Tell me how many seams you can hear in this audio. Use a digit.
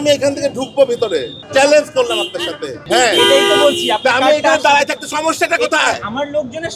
2